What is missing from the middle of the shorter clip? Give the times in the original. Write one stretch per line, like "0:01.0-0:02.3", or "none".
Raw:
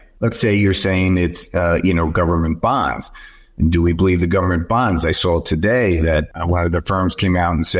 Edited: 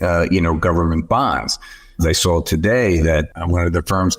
0:03.5-0:05.0